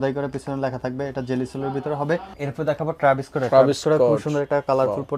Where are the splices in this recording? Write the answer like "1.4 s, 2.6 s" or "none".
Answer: 2.3 s